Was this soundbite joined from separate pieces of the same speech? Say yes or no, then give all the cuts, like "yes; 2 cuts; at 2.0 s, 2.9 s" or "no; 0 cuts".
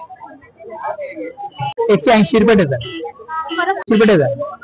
no; 0 cuts